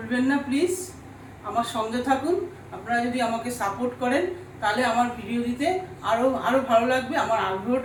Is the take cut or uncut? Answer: uncut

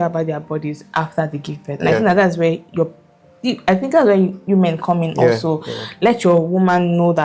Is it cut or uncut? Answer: uncut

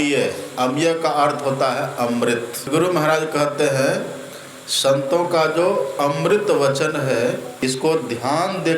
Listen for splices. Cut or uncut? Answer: cut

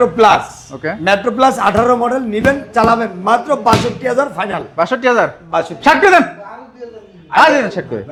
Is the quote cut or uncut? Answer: uncut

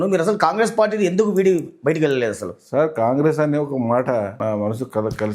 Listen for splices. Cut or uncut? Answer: cut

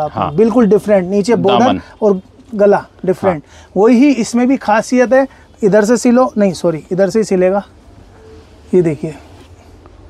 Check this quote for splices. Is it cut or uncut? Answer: uncut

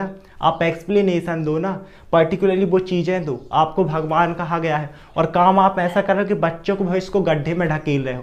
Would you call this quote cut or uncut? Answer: uncut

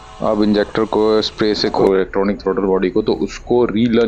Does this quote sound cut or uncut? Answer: cut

